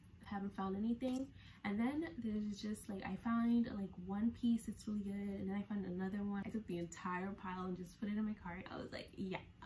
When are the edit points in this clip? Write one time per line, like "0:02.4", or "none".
0:06.4
0:08.6